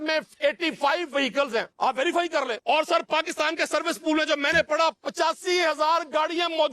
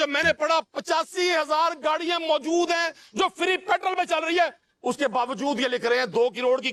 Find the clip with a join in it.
first; 2 cuts; at 1.7 s, 2.6 s

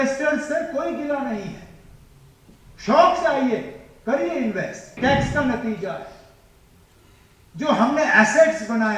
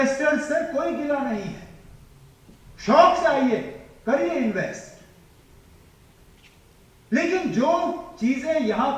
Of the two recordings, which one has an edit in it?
first; 1 cut; at 5.0 s

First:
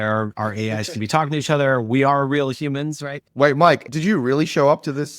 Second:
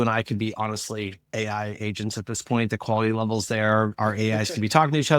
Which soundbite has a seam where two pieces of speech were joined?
first; 1 cut; at 3.8 s

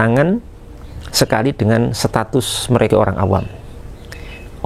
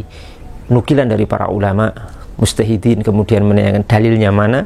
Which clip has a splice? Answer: first; 1 cut; at 2.9 s

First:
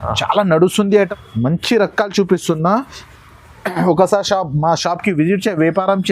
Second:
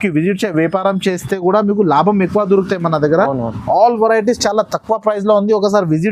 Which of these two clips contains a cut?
first; 1 cut; at 1.1 s

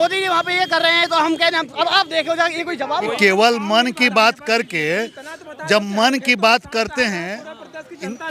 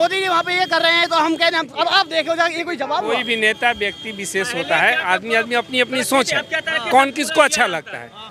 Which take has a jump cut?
first; 1 cut; at 3.1 s

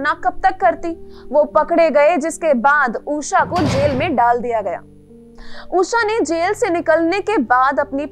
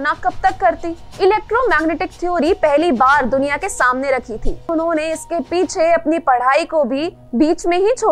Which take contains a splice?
second; 2 cuts; at 1.0 s, 4.6 s

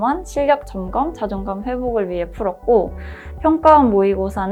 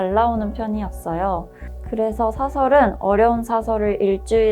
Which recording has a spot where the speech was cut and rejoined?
second; 1 cut; at 1.5 s

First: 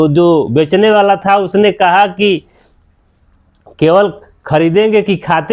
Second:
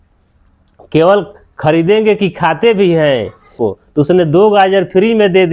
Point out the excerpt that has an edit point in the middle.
second; 1 cut; at 3.6 s

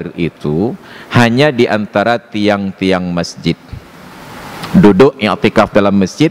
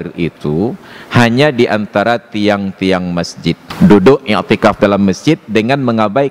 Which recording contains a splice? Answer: second; 1 cut; at 3.7 s

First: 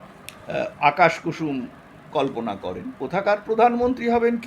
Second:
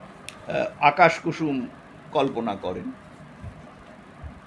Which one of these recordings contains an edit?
first; 1 cut; at 2.9 s

